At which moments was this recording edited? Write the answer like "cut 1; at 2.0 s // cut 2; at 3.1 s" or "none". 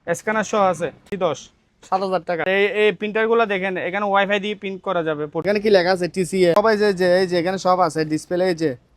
cut 1; at 1.1 s // cut 2; at 2.5 s // cut 3; at 5.4 s // cut 4; at 6.6 s